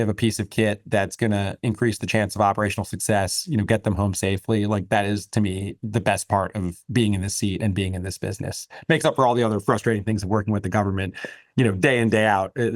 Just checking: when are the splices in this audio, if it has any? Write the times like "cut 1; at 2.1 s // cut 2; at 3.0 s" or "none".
none